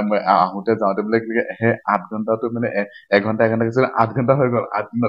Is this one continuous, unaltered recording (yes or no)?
yes